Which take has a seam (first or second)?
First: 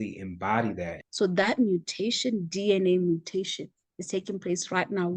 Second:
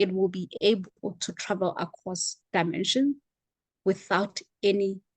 first